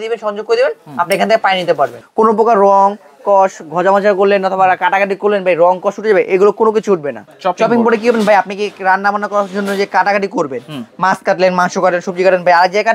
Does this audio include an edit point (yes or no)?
yes